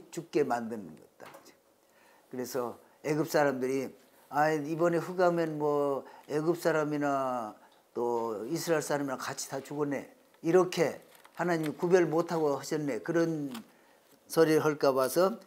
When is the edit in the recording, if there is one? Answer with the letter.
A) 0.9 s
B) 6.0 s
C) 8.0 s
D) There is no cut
D